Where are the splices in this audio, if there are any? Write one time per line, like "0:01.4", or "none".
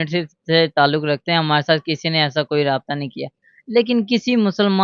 none